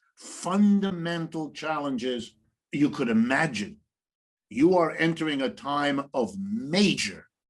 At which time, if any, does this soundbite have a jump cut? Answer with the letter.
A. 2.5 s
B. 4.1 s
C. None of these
B